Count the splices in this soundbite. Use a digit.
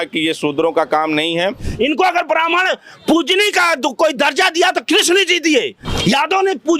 2